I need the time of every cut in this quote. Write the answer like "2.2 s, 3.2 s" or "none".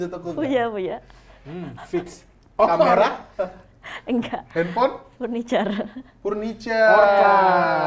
none